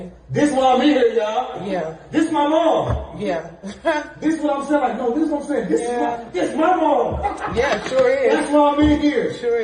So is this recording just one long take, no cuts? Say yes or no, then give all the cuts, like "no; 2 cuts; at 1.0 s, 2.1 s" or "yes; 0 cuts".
yes; 0 cuts